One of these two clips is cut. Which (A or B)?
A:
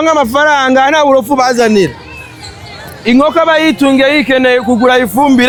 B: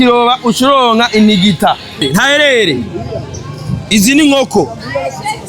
B